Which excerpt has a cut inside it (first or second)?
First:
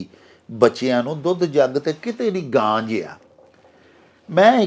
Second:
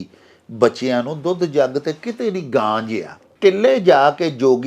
second